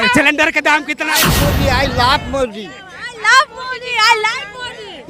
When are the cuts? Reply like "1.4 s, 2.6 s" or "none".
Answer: 1.2 s